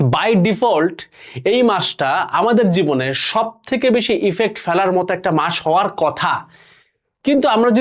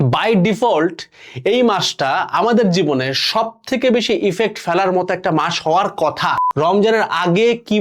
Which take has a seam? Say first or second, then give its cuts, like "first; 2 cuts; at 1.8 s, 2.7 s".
second; 1 cut; at 6.4 s